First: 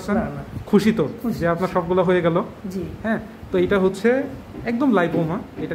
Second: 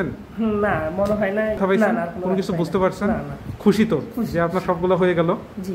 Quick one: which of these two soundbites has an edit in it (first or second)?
second